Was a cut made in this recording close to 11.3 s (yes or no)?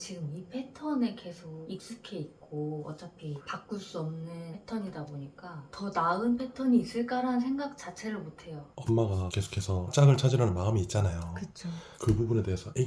no